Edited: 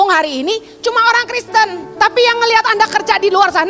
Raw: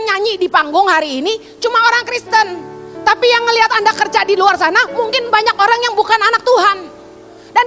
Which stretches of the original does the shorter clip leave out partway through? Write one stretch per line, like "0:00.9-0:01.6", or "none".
0:02.6-0:02.9

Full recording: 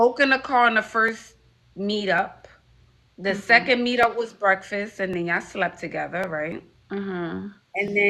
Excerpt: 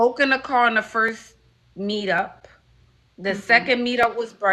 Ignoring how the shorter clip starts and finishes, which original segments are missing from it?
none

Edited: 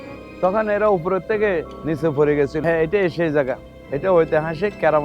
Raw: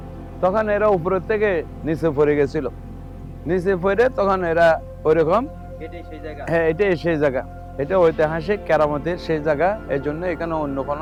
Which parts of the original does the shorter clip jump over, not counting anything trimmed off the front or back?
0:02.6-0:06.5

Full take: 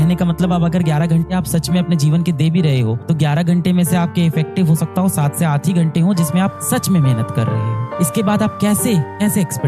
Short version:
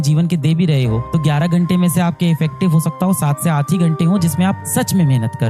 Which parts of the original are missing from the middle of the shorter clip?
none

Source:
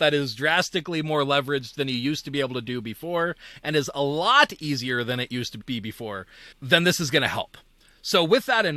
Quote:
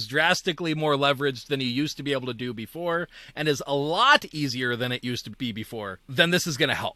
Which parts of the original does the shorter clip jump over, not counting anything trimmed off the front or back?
0:06.3-0:06.5

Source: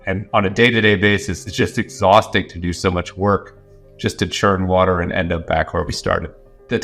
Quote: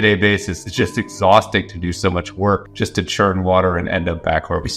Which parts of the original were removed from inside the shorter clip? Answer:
0:03.5-0:03.9

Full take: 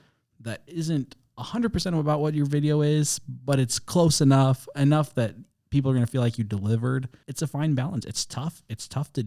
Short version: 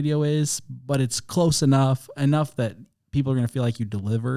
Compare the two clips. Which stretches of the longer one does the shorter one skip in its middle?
none

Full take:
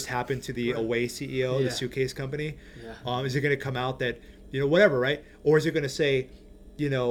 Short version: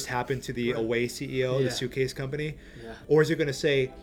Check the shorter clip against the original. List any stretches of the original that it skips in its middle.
0:02.9-0:05.3

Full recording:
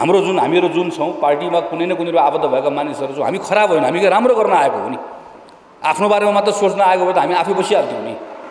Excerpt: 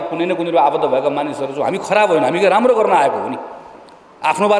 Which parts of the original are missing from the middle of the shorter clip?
none

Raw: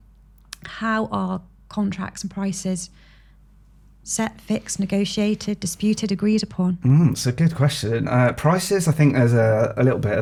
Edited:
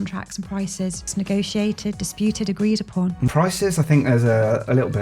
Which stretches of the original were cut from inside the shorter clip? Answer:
0:02.9-0:04.7
0:06.9-0:08.4

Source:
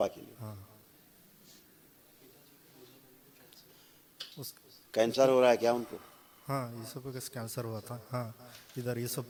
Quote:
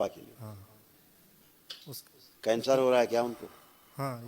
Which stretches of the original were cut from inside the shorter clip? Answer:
0:01.4-0:03.9

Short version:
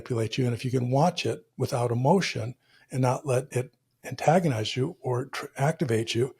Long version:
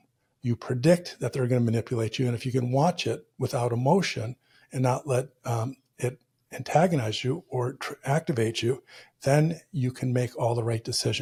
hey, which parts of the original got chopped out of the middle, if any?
0:05.3-0:06.0

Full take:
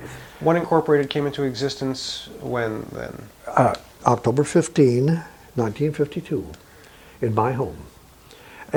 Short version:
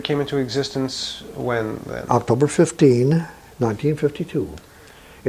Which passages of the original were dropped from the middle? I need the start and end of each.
0:03.0-0:03.9

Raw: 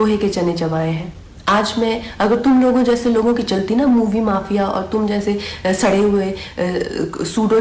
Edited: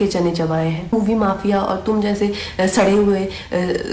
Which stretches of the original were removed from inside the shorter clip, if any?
0:01.2-0:04.0

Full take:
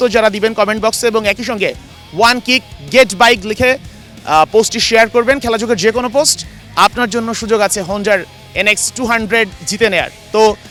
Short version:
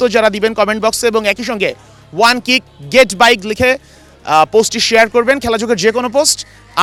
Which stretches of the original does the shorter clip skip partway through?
none

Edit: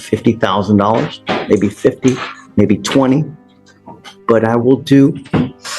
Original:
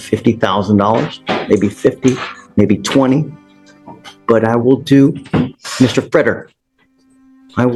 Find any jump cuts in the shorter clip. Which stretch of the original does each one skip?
none

